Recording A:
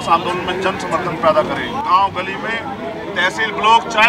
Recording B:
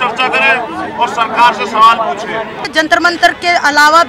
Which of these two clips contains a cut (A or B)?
B